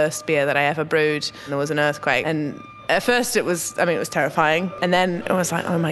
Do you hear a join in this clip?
yes; 2 cuts; at 1.5 s, 4.7 s

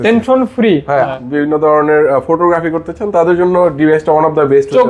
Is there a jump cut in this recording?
yes; 1 cut; at 1.1 s

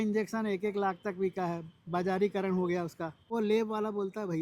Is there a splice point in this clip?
yes; 1 cut; at 3.3 s

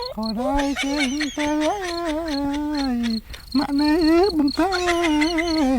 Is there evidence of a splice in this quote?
no; 0 cuts

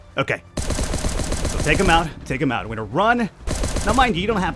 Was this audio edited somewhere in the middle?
yes; 1 cut; at 3.5 s

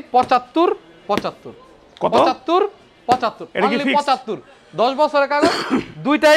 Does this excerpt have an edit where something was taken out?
no; 0 cuts

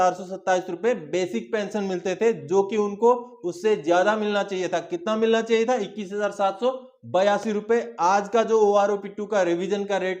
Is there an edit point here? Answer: no; 0 cuts

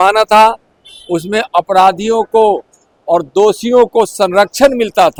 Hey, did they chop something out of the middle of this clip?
no; 0 cuts

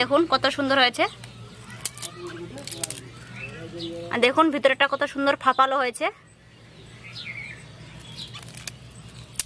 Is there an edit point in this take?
yes; 1 cut; at 4.1 s

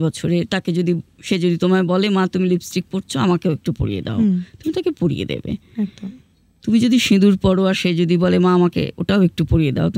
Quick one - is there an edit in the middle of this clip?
no; 0 cuts

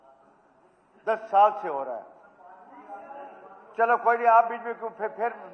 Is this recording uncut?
yes; 0 cuts

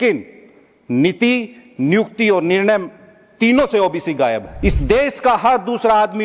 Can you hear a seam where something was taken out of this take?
yes; 1 cut; at 4.5 s

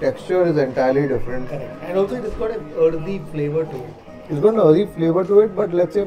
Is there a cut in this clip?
no; 0 cuts

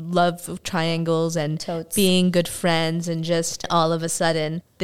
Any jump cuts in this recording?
no; 0 cuts

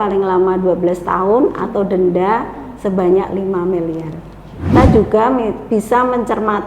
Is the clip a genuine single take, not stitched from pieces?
no; 1 cut; at 4.7 s

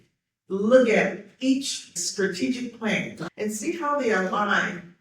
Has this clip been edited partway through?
yes; 2 cuts; at 2.0 s, 3.2 s

